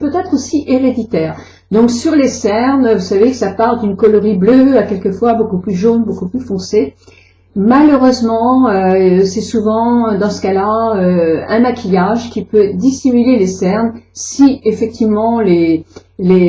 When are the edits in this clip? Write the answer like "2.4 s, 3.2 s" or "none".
4.6 s